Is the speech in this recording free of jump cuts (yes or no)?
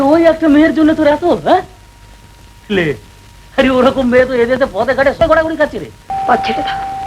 no